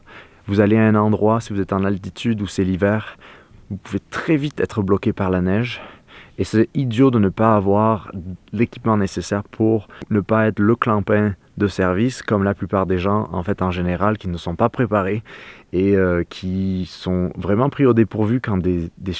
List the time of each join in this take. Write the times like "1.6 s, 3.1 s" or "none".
10.0 s